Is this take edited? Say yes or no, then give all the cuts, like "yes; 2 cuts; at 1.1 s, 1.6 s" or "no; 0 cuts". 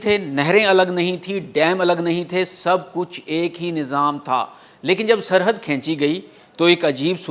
no; 0 cuts